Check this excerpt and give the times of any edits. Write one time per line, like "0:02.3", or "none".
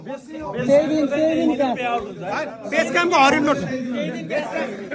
none